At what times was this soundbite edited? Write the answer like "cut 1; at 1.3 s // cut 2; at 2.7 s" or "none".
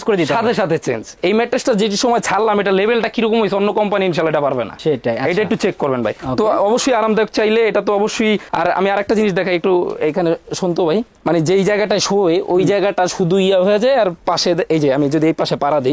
none